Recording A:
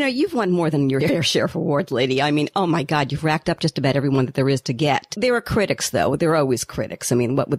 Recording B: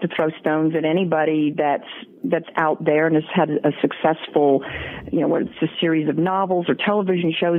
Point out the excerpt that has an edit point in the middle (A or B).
A